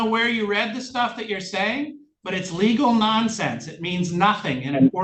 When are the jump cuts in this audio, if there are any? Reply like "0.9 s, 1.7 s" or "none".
none